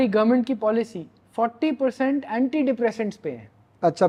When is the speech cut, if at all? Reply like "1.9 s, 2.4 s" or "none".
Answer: none